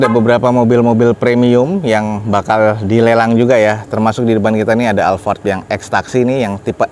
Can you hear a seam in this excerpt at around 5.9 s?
no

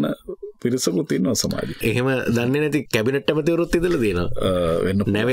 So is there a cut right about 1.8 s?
yes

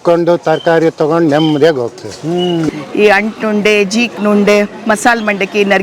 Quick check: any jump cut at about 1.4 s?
no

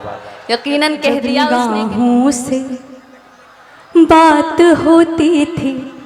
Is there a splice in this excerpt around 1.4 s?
yes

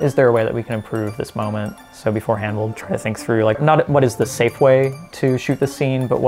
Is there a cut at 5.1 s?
no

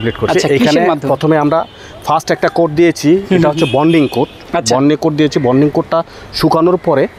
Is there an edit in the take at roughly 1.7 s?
no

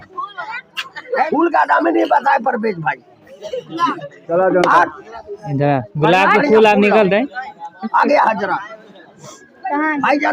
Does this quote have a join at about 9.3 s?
no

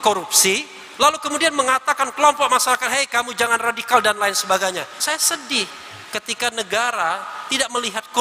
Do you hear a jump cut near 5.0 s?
yes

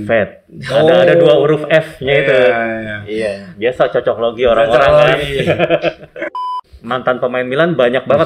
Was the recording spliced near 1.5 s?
no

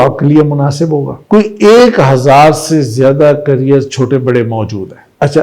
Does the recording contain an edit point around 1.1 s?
yes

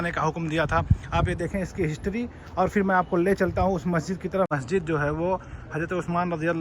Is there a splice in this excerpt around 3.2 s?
no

